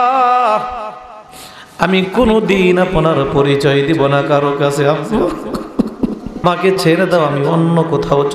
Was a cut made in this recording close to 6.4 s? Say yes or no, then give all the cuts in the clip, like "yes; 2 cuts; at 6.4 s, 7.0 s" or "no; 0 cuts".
yes; 1 cut; at 6.4 s